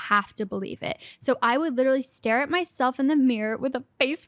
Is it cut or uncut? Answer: uncut